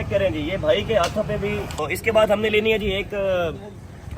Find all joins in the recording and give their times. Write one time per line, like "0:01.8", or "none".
0:01.8